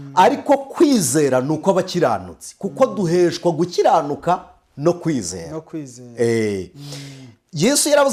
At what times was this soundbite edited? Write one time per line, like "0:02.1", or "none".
none